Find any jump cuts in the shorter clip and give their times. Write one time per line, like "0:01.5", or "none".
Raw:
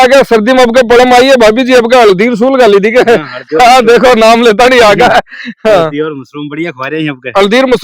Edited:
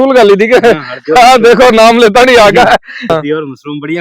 0:03.1